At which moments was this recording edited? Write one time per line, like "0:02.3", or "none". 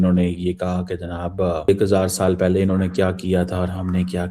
0:01.7